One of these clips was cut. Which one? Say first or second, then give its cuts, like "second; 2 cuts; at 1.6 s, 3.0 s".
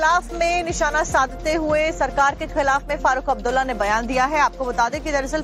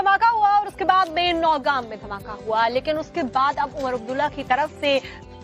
second; 1 cut; at 3.5 s